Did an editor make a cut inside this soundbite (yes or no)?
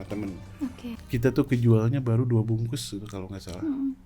yes